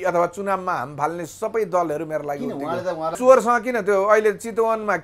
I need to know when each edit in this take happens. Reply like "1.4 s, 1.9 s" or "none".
3.2 s